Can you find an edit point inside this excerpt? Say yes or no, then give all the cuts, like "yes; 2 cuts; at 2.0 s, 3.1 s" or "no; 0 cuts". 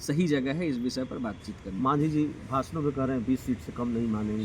no; 0 cuts